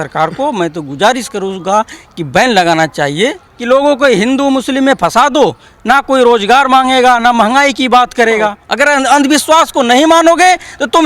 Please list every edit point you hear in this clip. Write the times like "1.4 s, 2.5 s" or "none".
3.5 s, 8.6 s